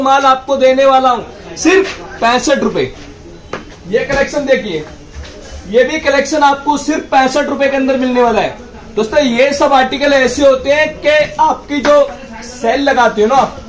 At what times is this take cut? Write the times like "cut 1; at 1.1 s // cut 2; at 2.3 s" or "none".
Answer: none